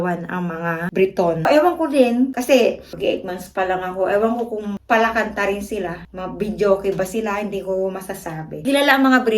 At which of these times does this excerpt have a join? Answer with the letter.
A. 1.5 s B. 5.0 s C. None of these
A